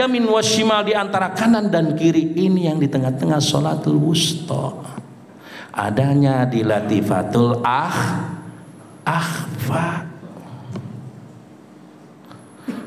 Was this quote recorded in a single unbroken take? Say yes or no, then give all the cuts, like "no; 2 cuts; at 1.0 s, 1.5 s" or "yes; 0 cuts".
yes; 0 cuts